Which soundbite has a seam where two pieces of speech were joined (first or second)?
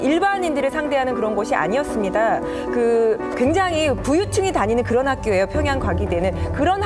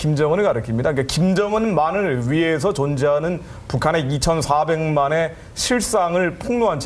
second